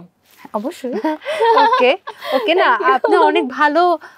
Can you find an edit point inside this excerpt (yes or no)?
no